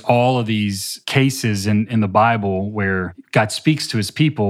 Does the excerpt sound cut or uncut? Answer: cut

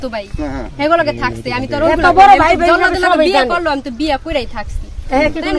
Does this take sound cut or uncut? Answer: uncut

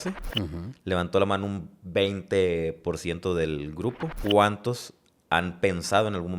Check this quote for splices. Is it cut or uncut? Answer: cut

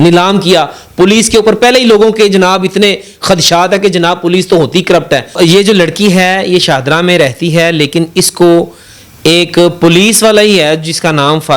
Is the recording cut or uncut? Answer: cut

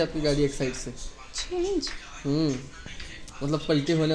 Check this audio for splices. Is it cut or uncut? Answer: uncut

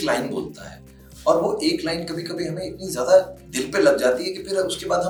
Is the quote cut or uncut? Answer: uncut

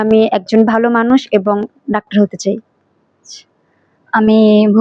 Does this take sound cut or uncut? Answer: uncut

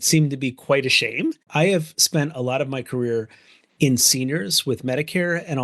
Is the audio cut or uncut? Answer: cut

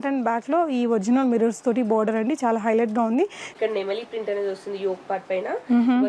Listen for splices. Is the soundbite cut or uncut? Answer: cut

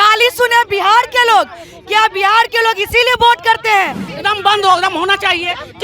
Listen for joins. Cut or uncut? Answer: cut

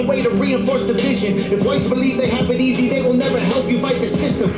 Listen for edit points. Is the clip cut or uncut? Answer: uncut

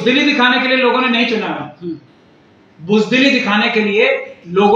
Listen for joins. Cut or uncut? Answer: uncut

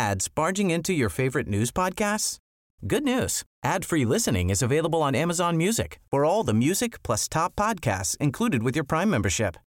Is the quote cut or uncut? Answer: uncut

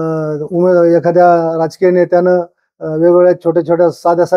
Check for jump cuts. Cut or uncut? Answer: uncut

